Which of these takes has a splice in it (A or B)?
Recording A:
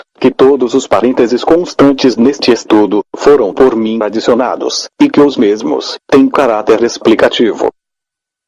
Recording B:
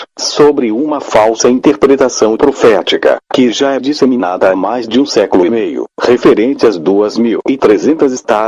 A